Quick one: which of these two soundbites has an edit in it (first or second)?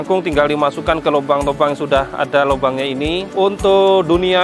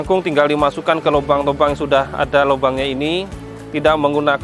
first